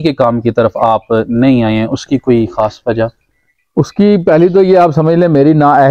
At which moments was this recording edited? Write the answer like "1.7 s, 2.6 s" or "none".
none